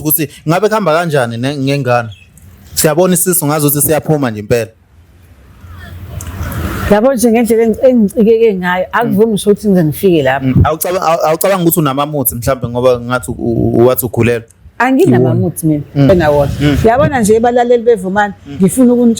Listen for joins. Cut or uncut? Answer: cut